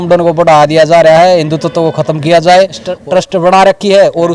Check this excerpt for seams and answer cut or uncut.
cut